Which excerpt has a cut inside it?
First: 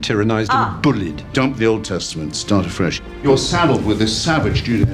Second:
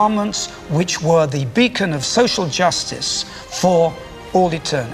first; 2 cuts; at 1.2 s, 3.1 s

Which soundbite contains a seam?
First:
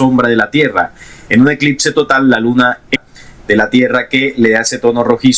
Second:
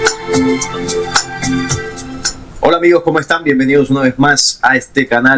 first; 1 cut; at 3.0 s

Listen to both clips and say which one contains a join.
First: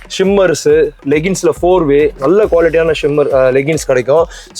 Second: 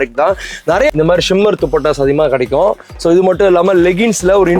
second; 1 cut; at 0.9 s

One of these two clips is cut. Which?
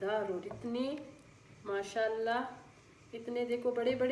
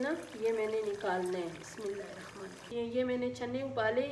second; 1 cut; at 2.6 s

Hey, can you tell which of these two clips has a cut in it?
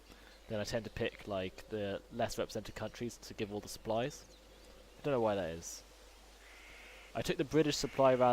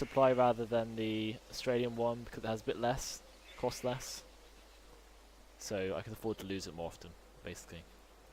first; 1 cut; at 5.4 s

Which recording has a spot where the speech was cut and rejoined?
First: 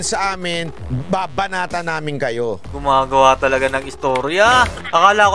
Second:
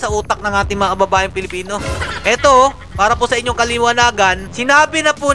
first; 1 cut; at 2.7 s

